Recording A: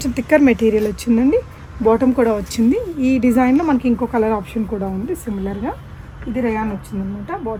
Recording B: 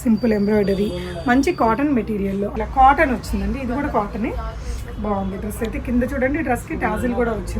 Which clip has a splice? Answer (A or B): B